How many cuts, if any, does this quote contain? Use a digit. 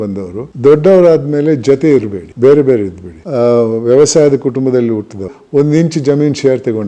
2